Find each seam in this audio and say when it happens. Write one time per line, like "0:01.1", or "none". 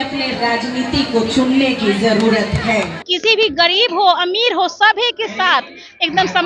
0:03.1